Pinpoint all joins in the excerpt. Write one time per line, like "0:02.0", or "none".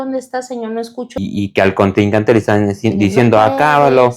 0:01.1